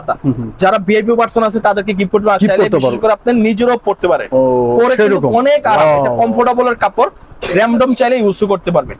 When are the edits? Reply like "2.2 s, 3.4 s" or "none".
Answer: none